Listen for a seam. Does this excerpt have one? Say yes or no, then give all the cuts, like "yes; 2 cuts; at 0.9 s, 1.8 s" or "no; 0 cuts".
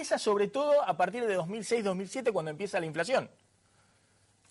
no; 0 cuts